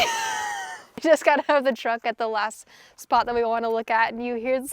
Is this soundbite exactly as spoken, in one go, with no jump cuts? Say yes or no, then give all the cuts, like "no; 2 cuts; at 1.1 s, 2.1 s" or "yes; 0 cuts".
no; 1 cut; at 1.0 s